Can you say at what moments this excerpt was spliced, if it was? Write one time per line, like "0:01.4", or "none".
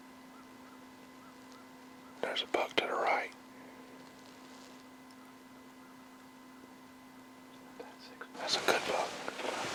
none